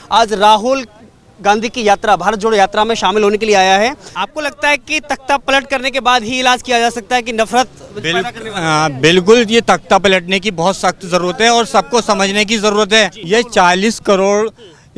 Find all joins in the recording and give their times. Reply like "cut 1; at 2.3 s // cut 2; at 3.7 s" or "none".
cut 1; at 4.1 s // cut 2; at 13.2 s